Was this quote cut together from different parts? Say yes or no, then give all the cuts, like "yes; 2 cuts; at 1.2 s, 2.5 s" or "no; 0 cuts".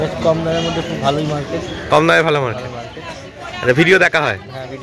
no; 0 cuts